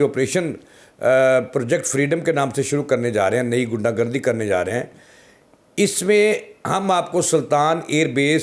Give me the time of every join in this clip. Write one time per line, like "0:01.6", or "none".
none